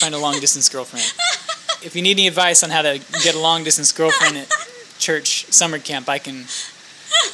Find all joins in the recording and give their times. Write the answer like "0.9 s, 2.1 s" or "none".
1.9 s